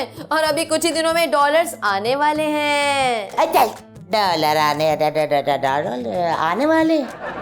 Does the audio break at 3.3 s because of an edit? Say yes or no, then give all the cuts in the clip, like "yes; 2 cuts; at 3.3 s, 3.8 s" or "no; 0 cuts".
no; 0 cuts